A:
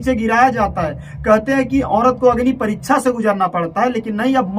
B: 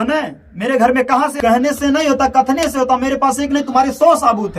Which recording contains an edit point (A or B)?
B